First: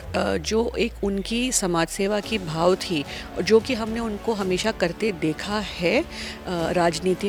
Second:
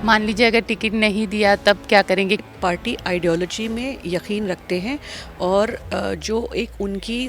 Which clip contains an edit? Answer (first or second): second